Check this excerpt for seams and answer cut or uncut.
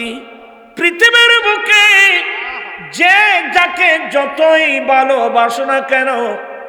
uncut